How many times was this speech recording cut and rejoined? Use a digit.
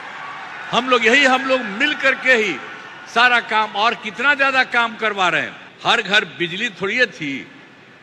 1